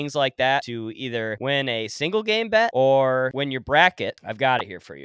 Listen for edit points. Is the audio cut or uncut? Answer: cut